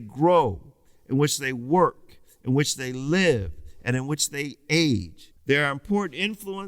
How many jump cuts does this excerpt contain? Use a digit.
1